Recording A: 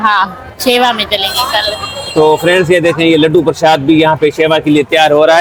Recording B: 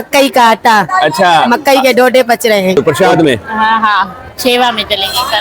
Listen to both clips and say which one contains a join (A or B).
B